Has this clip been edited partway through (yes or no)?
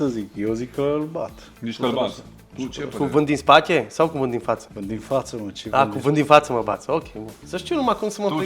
yes